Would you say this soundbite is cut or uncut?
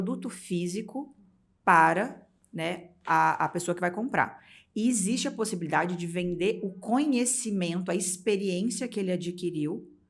uncut